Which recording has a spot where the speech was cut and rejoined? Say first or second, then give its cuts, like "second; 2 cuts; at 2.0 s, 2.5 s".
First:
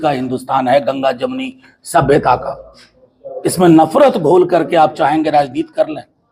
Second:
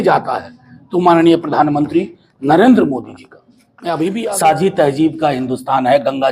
second; 1 cut; at 4.2 s